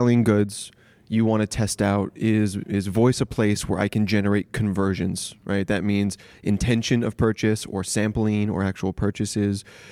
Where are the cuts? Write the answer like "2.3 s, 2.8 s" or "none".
none